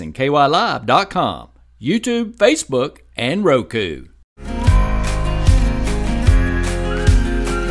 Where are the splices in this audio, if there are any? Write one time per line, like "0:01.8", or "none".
0:04.4